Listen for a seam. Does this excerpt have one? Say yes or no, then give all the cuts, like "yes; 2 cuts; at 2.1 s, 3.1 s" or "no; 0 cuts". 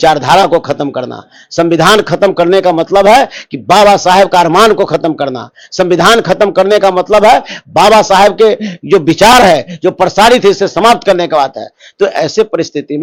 no; 0 cuts